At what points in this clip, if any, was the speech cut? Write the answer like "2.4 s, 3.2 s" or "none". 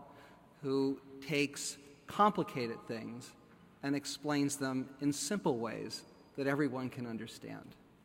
4.3 s

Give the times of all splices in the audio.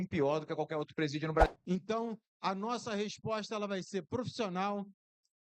1.5 s

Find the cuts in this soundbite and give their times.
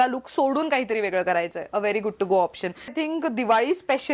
2.9 s

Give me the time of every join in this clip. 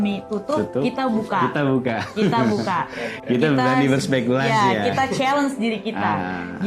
none

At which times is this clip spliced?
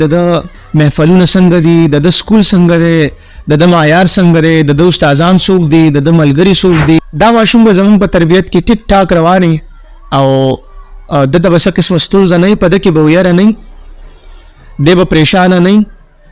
7.0 s

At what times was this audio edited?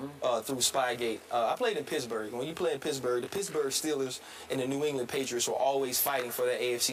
none

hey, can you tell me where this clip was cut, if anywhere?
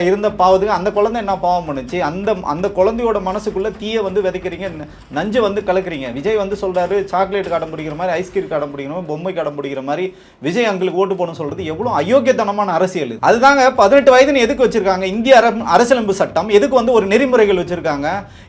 13.1 s

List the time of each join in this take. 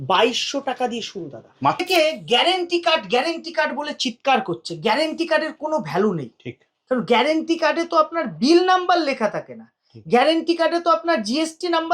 1.8 s

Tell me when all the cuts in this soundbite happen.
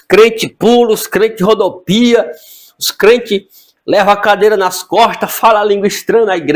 none

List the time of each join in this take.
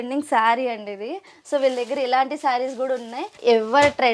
3.2 s

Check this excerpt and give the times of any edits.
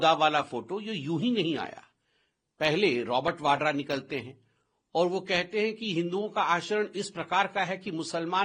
none

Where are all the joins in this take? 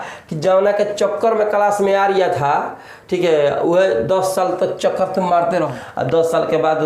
5.7 s

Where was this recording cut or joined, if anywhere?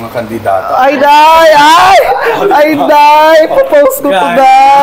none

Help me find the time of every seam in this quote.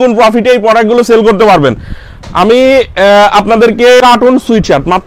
4.0 s

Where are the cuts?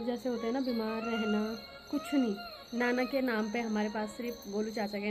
2.6 s

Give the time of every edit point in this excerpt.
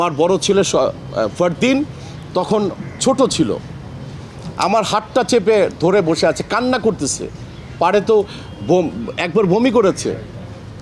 none

